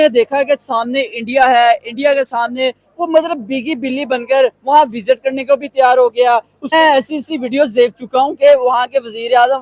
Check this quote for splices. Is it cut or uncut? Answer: cut